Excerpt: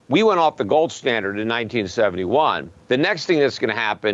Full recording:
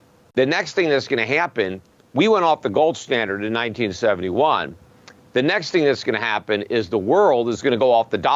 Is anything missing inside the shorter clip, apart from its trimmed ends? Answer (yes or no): yes